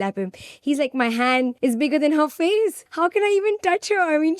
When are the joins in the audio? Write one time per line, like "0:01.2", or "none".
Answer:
0:01.5
0:02.8